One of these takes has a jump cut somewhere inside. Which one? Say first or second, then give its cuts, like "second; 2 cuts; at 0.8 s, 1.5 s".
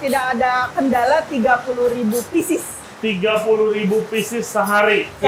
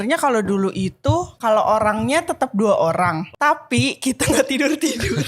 second; 2 cuts; at 1.3 s, 3.3 s